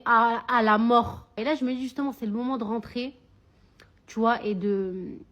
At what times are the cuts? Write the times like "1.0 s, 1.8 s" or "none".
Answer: 1.4 s